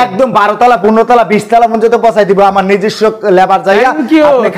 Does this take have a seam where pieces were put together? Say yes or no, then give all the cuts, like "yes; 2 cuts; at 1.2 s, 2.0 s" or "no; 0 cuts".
no; 0 cuts